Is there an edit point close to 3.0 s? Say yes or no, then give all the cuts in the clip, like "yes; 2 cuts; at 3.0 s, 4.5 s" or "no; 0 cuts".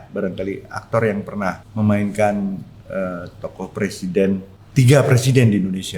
no; 2 cuts; at 1.6 s, 4.6 s